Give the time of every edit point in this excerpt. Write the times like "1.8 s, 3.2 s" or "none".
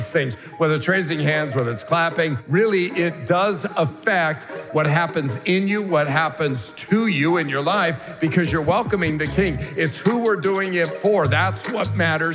2.4 s